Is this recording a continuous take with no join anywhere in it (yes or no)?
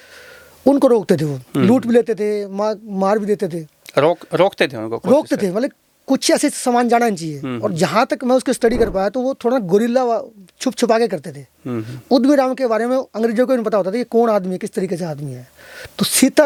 yes